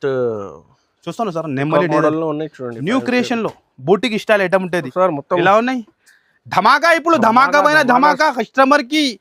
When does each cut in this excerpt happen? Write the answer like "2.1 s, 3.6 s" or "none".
4.9 s